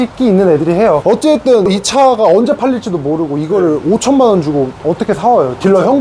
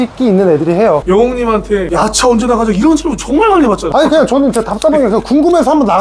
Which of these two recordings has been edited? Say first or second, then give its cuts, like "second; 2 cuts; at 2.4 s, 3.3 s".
second; 2 cuts; at 1.0 s, 3.8 s